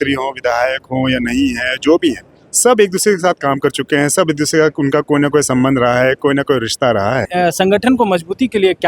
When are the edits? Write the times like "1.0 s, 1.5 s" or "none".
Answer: 7.3 s

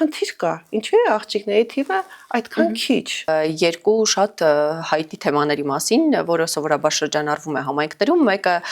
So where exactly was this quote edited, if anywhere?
3.3 s

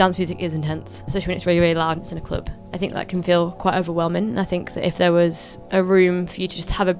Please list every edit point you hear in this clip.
1.1 s

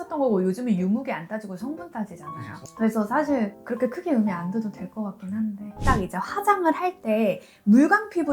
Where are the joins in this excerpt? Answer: 5.8 s

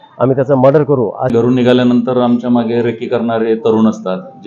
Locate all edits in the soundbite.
1.4 s

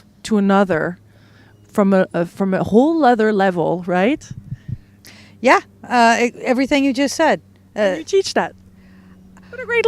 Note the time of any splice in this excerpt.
3.0 s

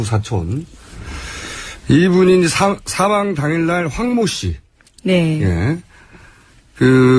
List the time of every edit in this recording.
1.8 s

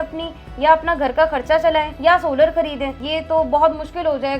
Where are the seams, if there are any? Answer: 1.9 s, 3.0 s

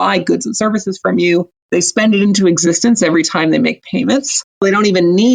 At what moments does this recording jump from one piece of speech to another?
1.5 s, 4.6 s

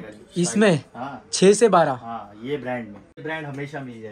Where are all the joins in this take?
3.2 s

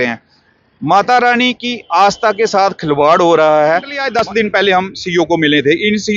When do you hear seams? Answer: 4.0 s

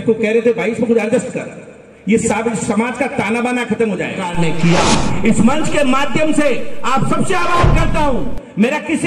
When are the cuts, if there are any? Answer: 4.2 s

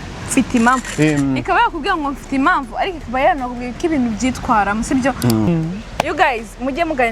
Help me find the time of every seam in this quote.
0.9 s, 5.5 s

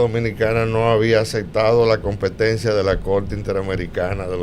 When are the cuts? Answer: none

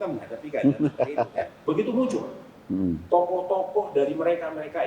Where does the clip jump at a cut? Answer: 1.5 s

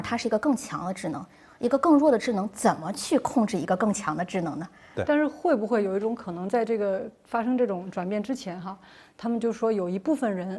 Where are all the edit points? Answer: 4.9 s

